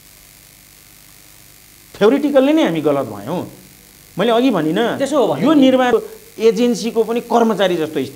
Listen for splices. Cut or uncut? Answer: cut